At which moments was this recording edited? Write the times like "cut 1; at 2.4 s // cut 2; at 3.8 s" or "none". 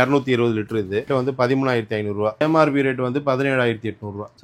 cut 1; at 1.1 s // cut 2; at 2.4 s